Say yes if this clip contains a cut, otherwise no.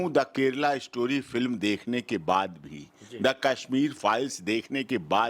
no